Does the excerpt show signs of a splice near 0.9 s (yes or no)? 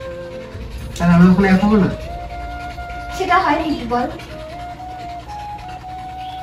no